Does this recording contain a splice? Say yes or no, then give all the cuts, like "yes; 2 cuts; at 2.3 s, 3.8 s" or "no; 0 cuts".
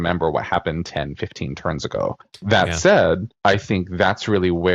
yes; 2 cuts; at 2.3 s, 3.3 s